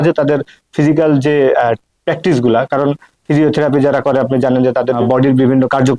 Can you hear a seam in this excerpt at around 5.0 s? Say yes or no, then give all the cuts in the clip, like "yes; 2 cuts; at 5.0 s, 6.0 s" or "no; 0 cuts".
yes; 1 cut; at 5.0 s